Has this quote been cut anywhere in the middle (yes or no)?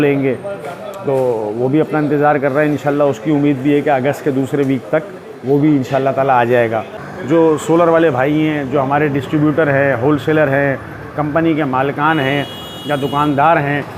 yes